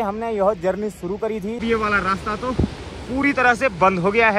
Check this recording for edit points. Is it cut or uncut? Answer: cut